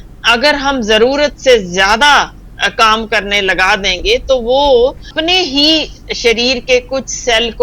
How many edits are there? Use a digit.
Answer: 1